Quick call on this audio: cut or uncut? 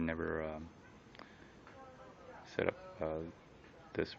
uncut